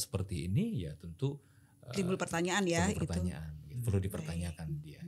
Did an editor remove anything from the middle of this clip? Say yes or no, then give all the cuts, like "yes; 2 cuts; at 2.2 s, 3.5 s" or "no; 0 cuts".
no; 0 cuts